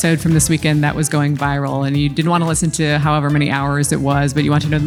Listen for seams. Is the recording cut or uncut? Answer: uncut